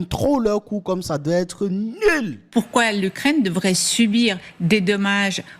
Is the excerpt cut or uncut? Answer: cut